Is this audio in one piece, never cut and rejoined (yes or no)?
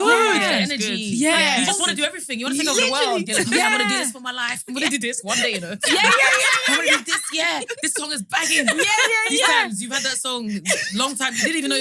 yes